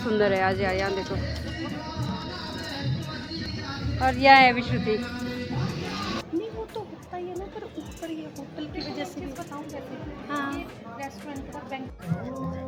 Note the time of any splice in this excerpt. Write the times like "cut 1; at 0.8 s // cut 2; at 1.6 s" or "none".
none